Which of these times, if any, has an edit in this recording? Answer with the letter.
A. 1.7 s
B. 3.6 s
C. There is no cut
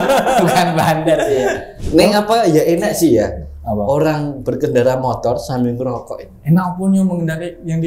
A